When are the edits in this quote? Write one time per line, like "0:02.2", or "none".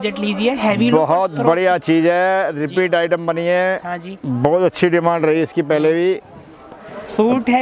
none